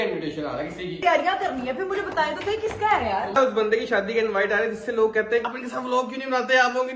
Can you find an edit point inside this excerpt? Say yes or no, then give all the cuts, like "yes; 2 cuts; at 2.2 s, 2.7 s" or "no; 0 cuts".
yes; 3 cuts; at 1.0 s, 3.4 s, 5.4 s